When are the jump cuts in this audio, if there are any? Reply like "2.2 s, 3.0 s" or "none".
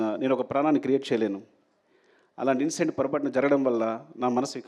none